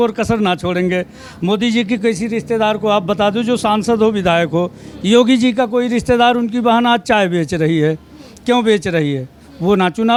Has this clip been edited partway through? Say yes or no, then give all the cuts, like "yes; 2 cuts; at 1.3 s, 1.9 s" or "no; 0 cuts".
no; 0 cuts